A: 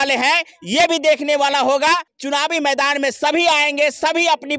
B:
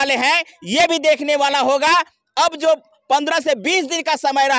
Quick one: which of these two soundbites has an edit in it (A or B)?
A